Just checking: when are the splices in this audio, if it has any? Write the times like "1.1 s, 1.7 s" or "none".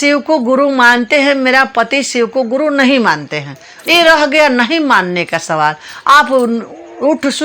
none